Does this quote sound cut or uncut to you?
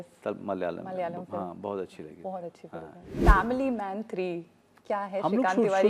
cut